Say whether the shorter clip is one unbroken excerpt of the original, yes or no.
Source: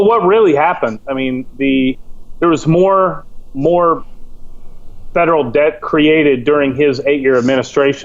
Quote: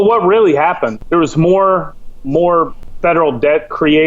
no